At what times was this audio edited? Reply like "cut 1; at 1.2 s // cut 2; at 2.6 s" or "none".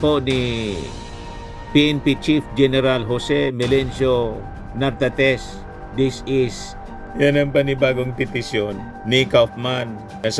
cut 1; at 7.0 s